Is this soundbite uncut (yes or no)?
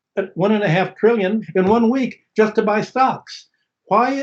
no